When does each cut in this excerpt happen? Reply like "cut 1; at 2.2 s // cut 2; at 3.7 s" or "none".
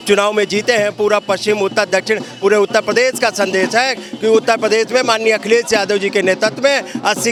none